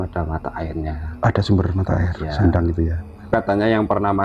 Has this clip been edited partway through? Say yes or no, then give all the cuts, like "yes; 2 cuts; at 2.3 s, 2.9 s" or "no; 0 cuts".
yes; 1 cut; at 3.2 s